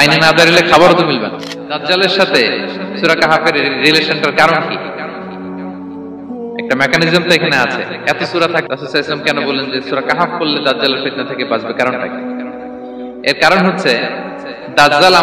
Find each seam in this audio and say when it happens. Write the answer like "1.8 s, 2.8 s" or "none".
1.7 s